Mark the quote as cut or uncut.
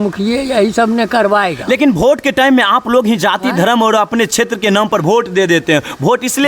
uncut